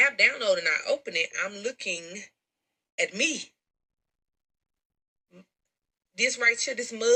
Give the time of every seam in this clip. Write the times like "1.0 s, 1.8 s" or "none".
none